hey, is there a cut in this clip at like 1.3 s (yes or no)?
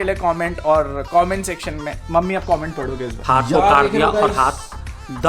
no